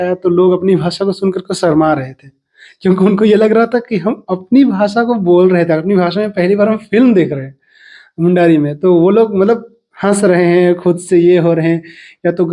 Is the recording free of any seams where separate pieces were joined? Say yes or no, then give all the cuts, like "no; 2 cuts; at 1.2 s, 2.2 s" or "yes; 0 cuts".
yes; 0 cuts